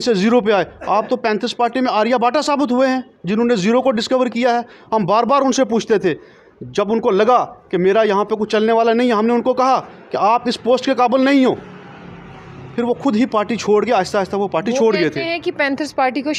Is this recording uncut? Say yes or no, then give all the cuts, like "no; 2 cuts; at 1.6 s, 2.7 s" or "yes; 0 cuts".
yes; 0 cuts